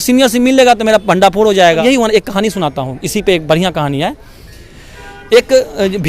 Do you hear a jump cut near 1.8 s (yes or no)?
yes